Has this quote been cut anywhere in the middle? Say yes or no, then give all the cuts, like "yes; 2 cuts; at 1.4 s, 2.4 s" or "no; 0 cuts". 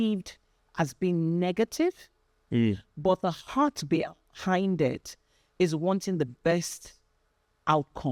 no; 0 cuts